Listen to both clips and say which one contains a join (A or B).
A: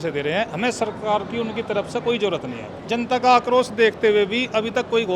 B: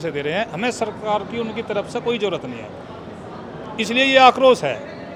A